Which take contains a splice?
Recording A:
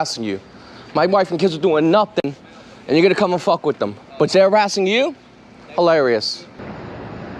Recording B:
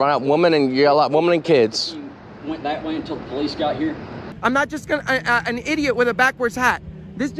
B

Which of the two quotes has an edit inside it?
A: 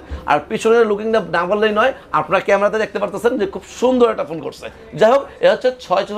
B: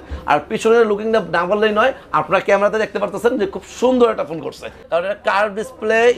B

